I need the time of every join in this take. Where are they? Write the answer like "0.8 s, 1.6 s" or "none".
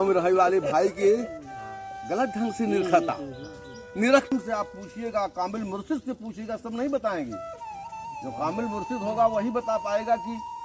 4.3 s